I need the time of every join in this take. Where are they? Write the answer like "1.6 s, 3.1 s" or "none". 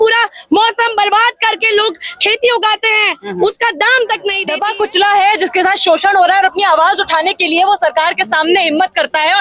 4.5 s